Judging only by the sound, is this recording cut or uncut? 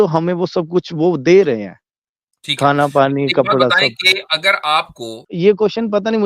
cut